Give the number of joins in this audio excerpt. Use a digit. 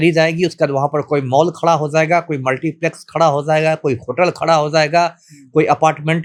0